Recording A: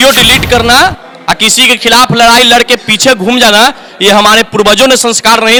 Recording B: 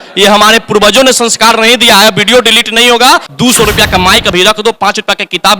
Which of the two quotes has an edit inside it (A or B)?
B